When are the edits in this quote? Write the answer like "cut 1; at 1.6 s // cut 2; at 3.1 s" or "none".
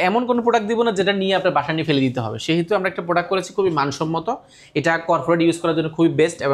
none